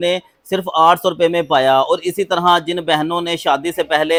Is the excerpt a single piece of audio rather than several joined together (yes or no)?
yes